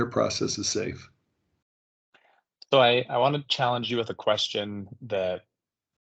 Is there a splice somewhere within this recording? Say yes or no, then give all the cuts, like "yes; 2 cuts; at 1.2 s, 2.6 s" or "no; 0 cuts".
no; 0 cuts